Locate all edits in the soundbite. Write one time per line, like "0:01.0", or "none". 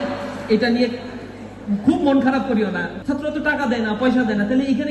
0:02.9